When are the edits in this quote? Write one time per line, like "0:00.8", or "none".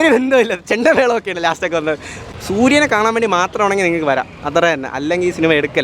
0:02.2